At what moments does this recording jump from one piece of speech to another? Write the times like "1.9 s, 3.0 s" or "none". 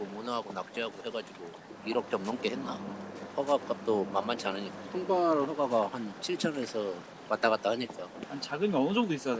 1.6 s, 3.3 s, 8.4 s